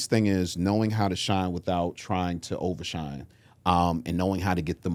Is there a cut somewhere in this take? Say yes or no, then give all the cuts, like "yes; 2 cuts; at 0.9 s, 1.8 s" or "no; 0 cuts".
no; 0 cuts